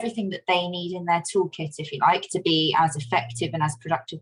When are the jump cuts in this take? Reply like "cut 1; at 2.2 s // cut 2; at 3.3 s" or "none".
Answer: none

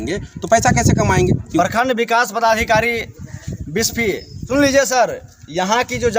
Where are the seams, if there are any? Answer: cut 1; at 1.6 s // cut 2; at 4.4 s

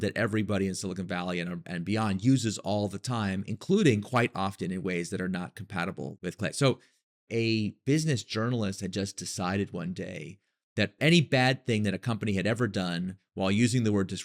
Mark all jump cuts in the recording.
none

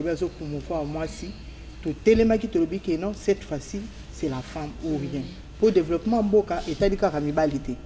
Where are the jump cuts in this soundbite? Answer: cut 1; at 5.4 s

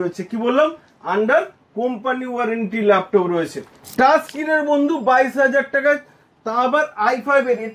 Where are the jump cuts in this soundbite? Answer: cut 1; at 3.6 s

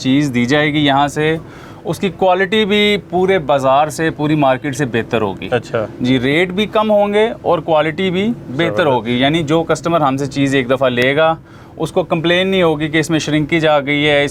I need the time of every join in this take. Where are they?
none

